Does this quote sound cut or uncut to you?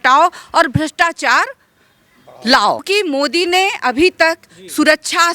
cut